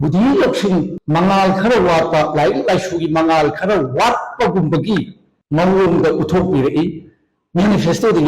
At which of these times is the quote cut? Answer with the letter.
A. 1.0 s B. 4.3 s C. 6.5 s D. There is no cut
A